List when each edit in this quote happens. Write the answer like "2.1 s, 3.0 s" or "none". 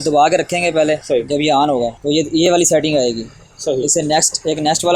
1.0 s, 2.0 s

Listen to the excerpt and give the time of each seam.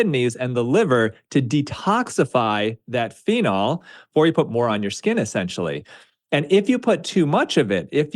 4.0 s

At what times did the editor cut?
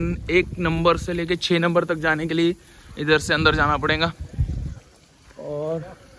none

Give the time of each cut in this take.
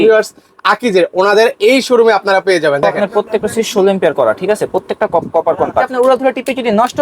2.9 s, 5.9 s

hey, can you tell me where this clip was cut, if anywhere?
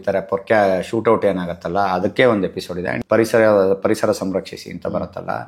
3.0 s

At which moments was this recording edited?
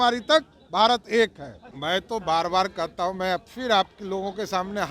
1.7 s

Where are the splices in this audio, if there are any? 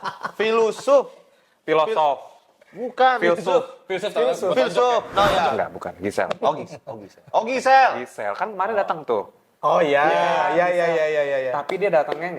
5.5 s

